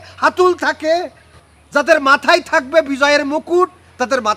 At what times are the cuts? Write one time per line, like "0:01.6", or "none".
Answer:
none